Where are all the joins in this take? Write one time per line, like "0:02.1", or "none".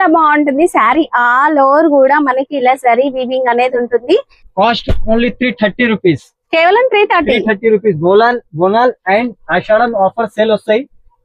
0:04.4